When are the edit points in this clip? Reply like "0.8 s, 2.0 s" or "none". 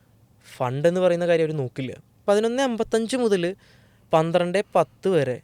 2.2 s